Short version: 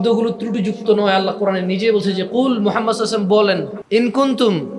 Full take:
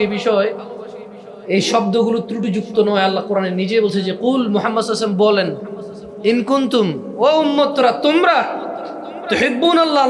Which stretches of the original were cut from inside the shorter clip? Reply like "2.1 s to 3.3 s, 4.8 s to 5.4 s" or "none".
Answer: 5.6 s to 6.1 s